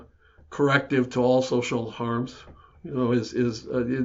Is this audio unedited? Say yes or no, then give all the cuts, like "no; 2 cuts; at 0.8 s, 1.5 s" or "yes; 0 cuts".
yes; 0 cuts